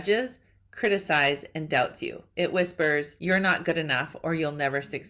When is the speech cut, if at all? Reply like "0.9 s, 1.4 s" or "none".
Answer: 3.1 s